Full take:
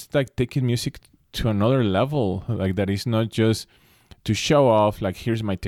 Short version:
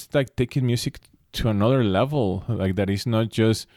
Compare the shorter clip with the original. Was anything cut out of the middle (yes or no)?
no